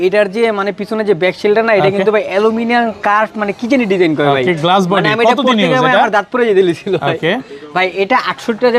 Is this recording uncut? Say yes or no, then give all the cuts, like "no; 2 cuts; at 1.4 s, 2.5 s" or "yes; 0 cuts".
yes; 0 cuts